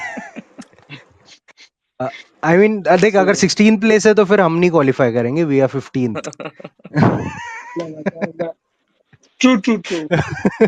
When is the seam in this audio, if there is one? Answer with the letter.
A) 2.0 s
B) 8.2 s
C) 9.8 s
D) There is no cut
D